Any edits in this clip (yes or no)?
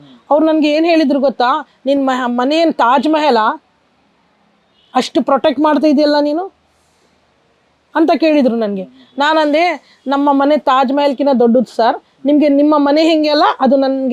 no